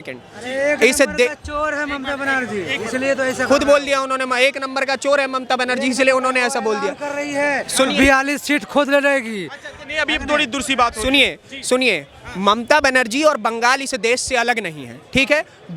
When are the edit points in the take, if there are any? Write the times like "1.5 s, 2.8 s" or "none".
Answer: none